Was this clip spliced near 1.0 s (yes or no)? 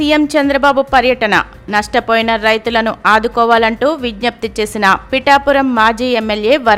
no